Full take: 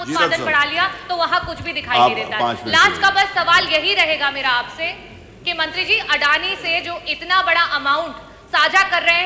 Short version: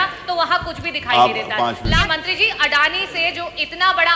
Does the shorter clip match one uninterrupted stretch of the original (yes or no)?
no